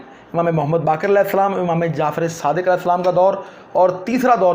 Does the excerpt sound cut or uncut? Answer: uncut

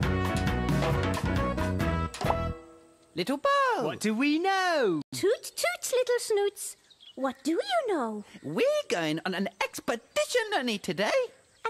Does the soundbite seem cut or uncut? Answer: cut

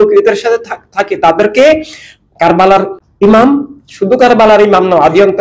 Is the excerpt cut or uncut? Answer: cut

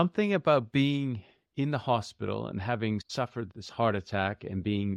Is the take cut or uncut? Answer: cut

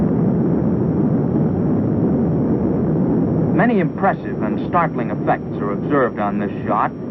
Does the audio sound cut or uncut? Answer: cut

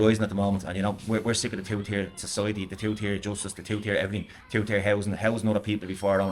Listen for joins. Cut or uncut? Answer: uncut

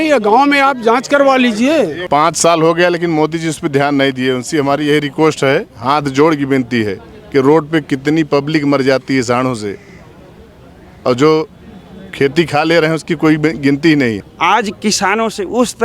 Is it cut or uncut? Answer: cut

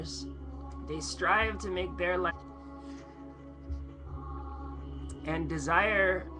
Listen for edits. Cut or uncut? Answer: uncut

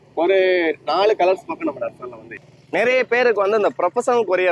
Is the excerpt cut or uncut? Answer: cut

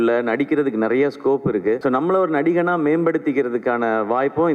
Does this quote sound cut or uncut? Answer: cut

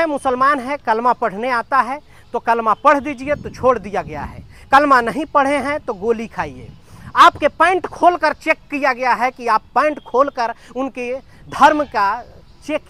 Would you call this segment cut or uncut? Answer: uncut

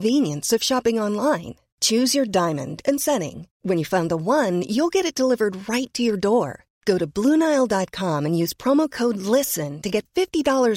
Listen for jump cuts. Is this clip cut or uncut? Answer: uncut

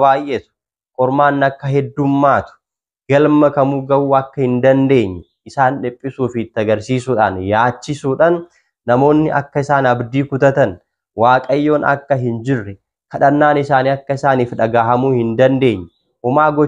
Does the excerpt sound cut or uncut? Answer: uncut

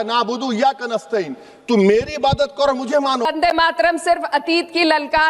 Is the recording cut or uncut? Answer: cut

